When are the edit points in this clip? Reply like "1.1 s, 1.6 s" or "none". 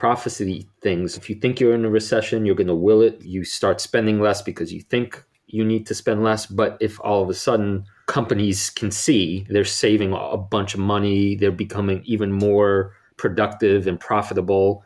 1.2 s, 3.2 s, 7.9 s, 12.0 s